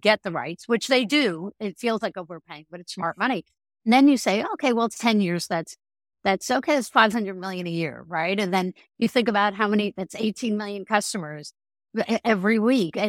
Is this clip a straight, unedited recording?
yes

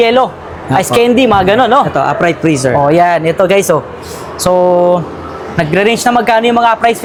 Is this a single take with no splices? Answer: yes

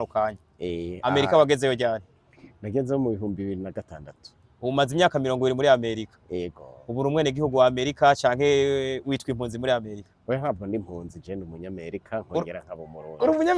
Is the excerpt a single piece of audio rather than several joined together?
yes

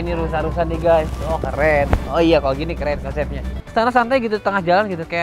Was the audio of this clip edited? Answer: yes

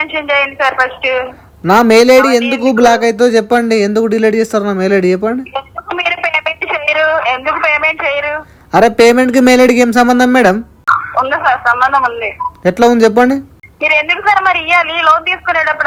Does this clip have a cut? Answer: no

